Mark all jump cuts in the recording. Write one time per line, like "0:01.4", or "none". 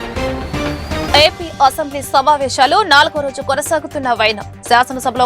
0:01.1